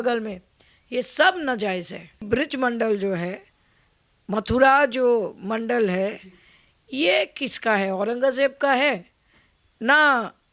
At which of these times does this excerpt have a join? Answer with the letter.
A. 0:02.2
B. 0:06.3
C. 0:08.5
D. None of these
A